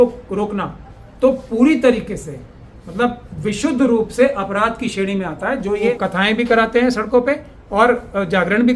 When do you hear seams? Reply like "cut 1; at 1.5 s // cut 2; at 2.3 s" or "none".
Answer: cut 1; at 6.0 s